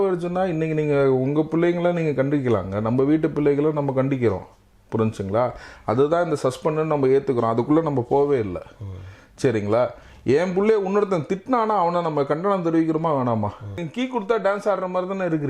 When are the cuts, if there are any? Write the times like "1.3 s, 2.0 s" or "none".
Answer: 13.8 s